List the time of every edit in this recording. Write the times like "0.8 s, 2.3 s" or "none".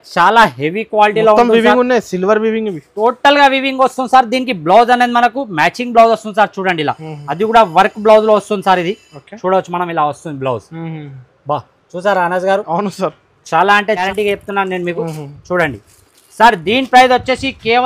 14.0 s